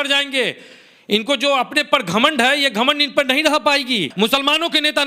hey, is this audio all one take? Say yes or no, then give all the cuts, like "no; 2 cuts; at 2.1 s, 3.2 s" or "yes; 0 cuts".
no; 1 cut; at 4.1 s